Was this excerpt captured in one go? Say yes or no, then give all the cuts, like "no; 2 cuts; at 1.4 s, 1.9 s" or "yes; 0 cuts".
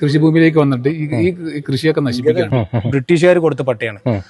no; 1 cut; at 2.5 s